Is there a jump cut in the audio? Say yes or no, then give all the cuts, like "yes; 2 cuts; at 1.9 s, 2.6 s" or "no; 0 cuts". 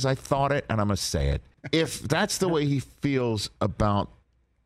yes; 1 cut; at 1.5 s